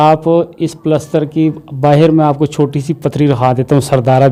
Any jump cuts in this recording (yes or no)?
no